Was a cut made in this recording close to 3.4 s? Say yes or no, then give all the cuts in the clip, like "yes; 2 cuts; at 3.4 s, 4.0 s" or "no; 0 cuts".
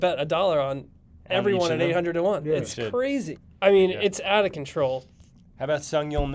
yes; 1 cut; at 3.4 s